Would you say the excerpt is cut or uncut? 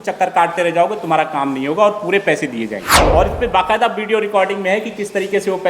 cut